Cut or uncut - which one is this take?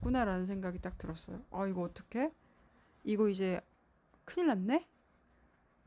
uncut